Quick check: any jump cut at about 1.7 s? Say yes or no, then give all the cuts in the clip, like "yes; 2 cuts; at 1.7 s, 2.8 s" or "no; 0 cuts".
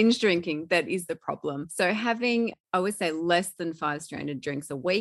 yes; 1 cut; at 1.7 s